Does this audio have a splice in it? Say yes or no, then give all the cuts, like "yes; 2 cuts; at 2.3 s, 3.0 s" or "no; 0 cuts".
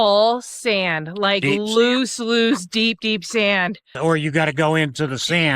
yes; 1 cut; at 3.9 s